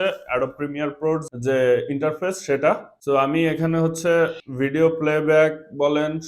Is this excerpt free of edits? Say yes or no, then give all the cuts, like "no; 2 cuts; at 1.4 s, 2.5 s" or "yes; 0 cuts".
no; 3 cuts; at 1.2 s, 2.9 s, 4.4 s